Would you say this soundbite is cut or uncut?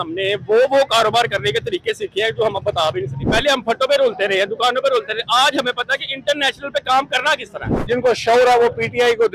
cut